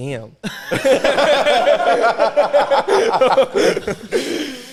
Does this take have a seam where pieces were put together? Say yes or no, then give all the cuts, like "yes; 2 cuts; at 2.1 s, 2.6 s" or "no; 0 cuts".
no; 0 cuts